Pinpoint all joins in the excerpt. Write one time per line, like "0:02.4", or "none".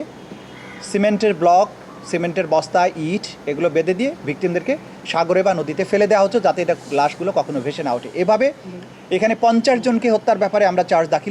none